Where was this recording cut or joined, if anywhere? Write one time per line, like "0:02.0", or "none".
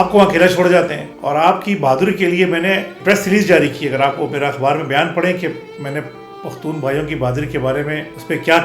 0:01.1